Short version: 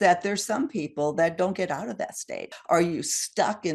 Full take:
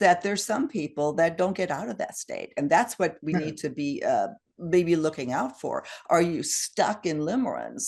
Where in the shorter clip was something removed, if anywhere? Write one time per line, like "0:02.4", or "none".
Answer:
0:02.5

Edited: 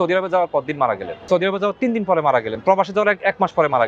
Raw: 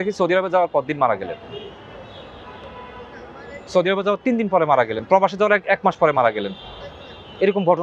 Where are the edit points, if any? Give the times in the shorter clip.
0:01.1

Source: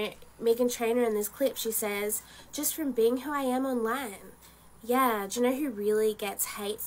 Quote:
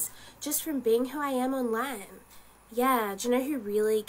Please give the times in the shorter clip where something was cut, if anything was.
none

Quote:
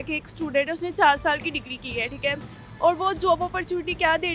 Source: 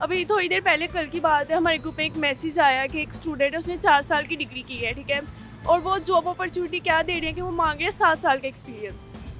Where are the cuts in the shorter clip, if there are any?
none

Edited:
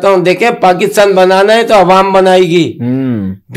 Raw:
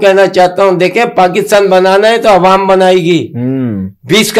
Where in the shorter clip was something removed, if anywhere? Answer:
none

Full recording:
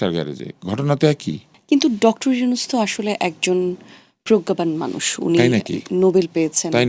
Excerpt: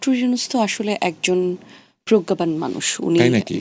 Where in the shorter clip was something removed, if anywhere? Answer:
none

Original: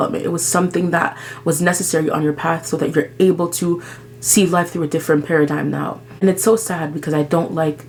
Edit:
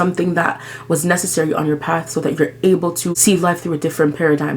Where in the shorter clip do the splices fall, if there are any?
0:03.1

